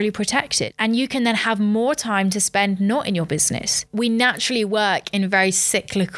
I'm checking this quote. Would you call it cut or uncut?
cut